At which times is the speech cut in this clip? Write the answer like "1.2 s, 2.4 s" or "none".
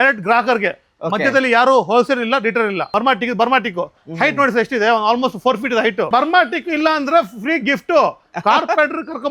2.9 s, 6.1 s